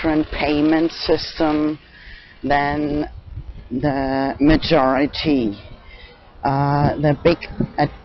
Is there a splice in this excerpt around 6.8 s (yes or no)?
no